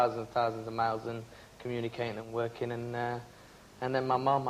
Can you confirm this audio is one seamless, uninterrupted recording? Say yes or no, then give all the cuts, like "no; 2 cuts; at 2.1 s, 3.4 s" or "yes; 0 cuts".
no; 1 cut; at 3.4 s